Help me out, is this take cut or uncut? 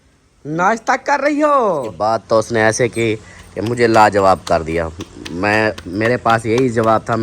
cut